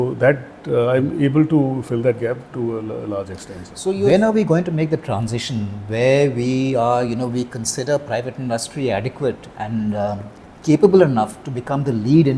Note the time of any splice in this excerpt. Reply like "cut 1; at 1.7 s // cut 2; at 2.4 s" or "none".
cut 1; at 4.0 s